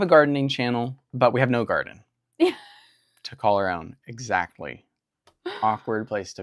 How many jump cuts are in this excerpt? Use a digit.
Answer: 1